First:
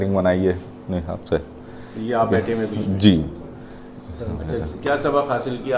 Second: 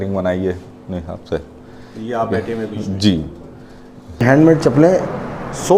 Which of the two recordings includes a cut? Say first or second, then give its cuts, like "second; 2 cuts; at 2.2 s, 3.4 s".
second; 1 cut; at 4.2 s